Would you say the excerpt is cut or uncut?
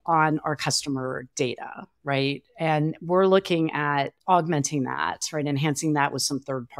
cut